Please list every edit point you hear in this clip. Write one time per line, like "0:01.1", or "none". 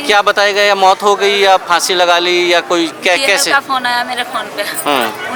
none